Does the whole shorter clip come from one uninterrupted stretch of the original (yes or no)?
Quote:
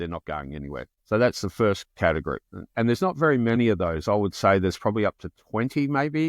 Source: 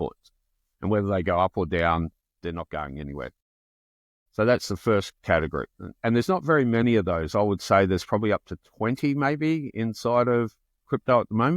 no